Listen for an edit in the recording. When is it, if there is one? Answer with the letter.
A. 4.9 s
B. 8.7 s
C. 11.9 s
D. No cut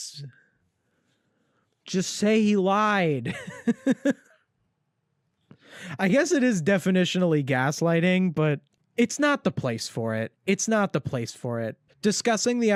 D